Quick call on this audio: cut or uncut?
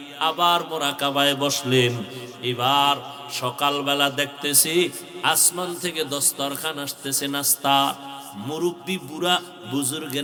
uncut